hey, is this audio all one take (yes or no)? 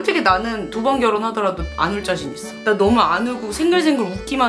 yes